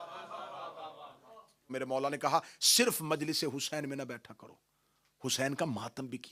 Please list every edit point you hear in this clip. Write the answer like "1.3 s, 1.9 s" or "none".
1.7 s